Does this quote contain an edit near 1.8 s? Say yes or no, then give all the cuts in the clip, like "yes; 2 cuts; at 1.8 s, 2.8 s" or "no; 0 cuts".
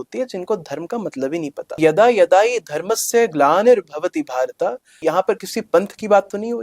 yes; 2 cuts; at 1.8 s, 5.0 s